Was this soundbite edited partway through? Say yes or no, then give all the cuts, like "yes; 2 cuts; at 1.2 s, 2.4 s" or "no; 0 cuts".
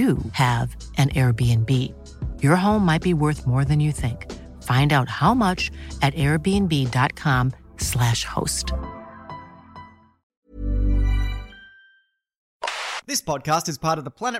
yes; 2 cuts; at 10.3 s, 12.5 s